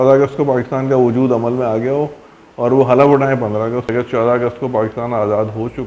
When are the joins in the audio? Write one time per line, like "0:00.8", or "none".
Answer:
0:03.9